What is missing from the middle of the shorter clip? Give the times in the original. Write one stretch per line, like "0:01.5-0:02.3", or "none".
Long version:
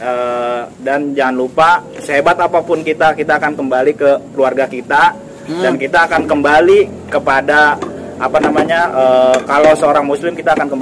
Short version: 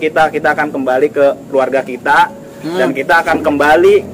none